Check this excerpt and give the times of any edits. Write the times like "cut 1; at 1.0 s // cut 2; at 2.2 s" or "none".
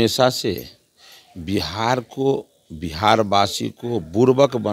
none